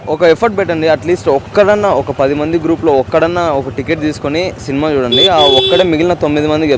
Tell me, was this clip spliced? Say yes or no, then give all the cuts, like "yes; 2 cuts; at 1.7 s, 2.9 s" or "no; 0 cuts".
no; 0 cuts